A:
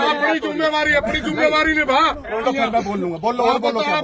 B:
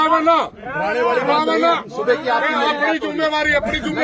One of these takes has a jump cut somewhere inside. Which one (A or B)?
A